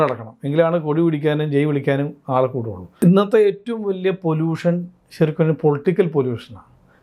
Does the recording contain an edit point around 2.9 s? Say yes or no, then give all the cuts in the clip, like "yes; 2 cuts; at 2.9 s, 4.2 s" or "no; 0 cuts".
yes; 1 cut; at 2.9 s